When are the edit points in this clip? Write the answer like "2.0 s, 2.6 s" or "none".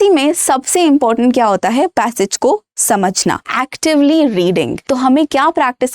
3.5 s, 4.8 s